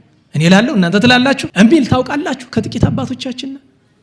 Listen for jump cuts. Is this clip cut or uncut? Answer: cut